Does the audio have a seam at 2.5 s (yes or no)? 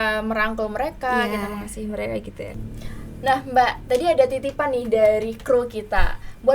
yes